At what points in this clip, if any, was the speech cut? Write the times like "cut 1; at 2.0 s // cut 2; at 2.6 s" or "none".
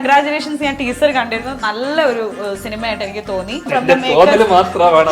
cut 1; at 3.7 s